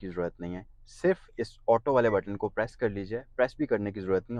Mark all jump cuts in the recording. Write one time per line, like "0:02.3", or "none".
none